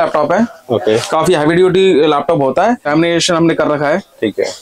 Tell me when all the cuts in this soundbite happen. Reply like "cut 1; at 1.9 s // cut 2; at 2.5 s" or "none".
cut 1; at 2.9 s